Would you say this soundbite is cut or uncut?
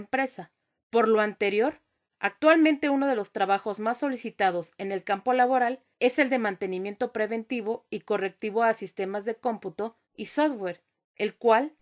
cut